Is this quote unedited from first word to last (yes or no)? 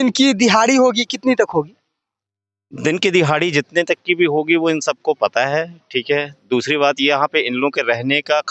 yes